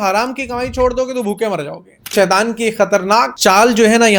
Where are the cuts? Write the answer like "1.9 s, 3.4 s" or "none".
2.1 s